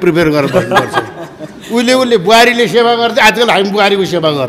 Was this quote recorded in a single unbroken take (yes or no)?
yes